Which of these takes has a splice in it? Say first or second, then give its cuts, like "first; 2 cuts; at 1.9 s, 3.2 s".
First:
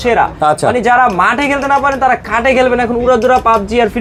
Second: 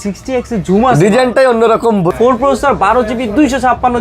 second; 1 cut; at 2.1 s